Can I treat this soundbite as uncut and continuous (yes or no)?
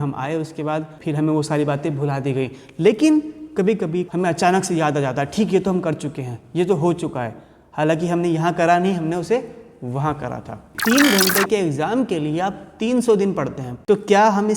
no